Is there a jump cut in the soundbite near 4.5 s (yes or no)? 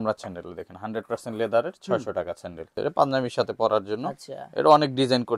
no